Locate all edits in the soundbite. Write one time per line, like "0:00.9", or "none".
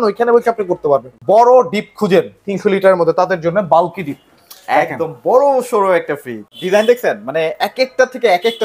0:01.1
0:06.4